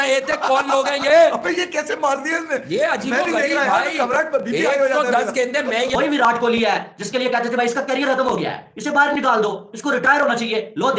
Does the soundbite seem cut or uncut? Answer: cut